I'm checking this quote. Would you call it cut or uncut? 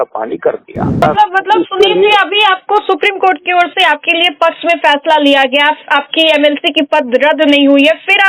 cut